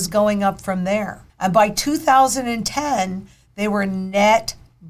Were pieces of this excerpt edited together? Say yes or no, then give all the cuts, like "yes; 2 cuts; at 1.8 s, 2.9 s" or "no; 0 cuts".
yes; 1 cut; at 1.2 s